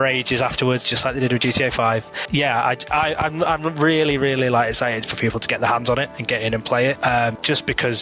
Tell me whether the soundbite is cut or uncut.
uncut